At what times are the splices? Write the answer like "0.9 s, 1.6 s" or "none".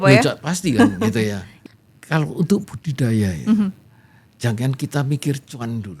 1.5 s